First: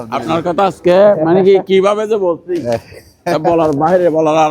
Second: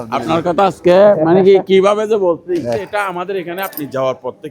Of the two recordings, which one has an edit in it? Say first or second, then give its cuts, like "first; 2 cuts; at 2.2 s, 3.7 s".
second; 1 cut; at 2.9 s